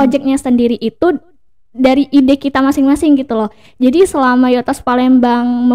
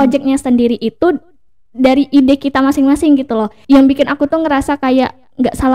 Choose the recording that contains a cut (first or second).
second